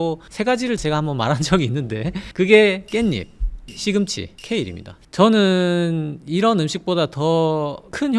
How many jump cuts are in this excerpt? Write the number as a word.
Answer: one